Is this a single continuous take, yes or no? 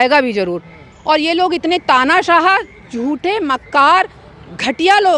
yes